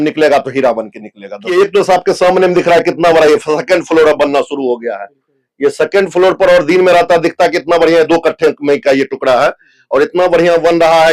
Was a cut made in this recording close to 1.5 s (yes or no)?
yes